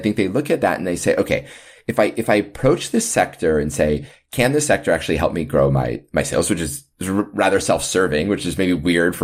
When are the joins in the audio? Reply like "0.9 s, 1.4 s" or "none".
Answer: none